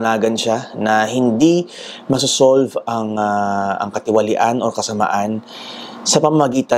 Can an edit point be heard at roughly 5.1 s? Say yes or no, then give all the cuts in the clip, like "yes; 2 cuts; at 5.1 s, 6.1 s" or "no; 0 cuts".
no; 0 cuts